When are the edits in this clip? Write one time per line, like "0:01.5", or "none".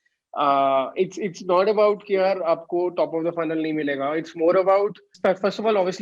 0:05.1